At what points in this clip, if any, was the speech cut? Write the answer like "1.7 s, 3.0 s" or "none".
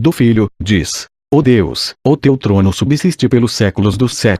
3.5 s

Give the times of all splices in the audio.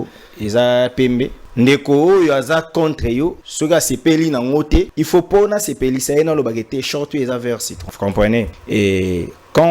1.4 s, 3.4 s, 5.0 s, 7.8 s, 8.6 s

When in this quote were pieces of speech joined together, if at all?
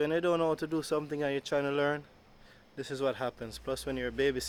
none

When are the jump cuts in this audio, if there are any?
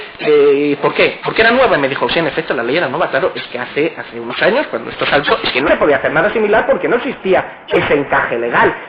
1.4 s

